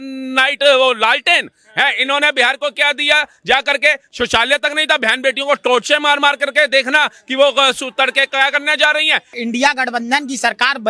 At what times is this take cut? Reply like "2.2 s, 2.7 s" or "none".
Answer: 9.4 s